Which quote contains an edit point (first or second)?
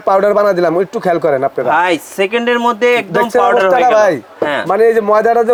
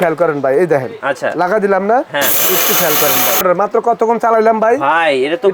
second